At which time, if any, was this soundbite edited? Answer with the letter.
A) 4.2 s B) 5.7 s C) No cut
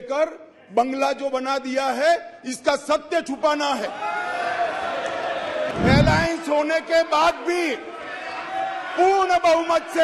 B